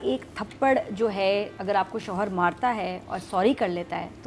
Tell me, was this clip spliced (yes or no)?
yes